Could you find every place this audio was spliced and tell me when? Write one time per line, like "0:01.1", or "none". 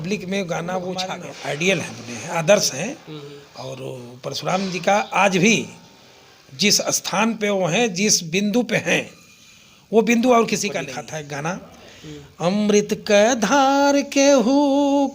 0:01.2
0:11.0